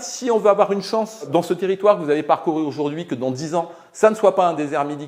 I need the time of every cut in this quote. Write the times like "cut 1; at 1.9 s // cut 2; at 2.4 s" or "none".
none